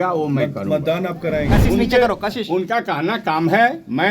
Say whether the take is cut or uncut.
cut